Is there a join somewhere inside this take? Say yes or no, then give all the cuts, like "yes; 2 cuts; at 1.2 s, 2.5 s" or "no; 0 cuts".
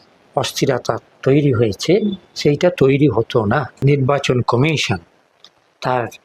yes; 1 cut; at 3.8 s